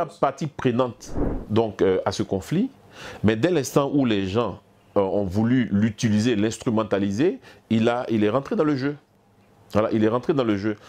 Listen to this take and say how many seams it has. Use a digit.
0